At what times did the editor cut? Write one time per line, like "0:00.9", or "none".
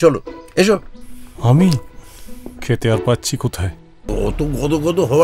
0:04.1